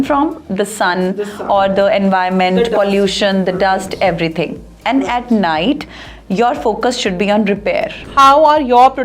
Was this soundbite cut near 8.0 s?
yes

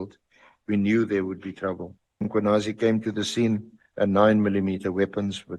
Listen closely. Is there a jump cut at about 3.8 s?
yes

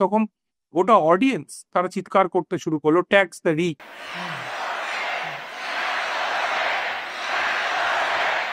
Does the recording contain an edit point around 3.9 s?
yes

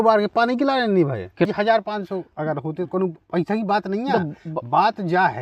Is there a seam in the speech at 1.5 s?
yes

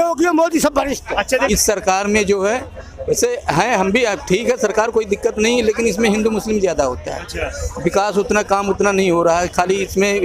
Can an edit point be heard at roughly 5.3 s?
no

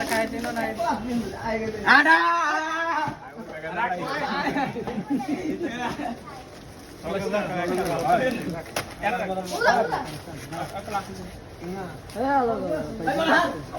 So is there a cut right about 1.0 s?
no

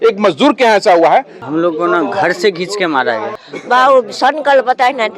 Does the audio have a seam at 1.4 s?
yes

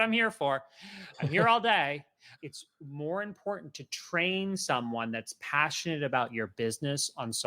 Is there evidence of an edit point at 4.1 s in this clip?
no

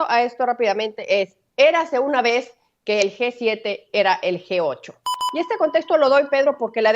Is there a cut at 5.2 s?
yes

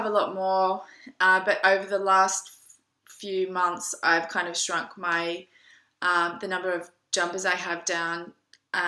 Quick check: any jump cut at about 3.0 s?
no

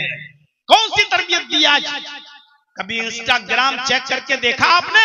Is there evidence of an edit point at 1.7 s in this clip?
no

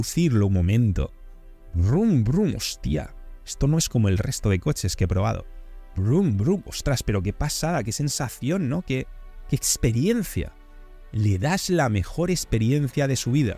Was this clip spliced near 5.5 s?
no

